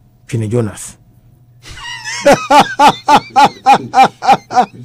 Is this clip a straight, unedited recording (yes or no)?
yes